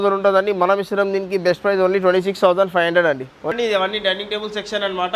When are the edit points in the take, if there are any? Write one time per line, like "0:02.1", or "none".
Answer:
0:03.5